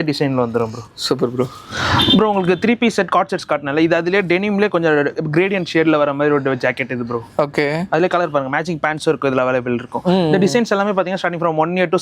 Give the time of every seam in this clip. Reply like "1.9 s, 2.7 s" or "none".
none